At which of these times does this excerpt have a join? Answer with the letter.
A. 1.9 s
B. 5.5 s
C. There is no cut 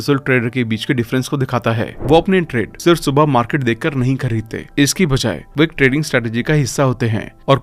A